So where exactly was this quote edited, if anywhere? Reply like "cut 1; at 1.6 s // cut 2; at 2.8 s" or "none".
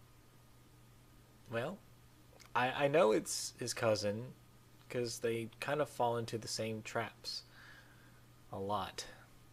none